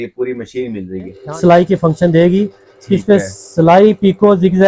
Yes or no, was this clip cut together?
yes